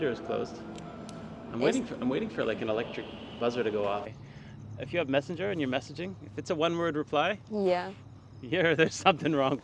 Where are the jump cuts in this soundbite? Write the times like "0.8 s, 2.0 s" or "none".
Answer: 4.1 s